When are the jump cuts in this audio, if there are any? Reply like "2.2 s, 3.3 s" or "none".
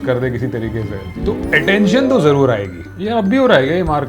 3.0 s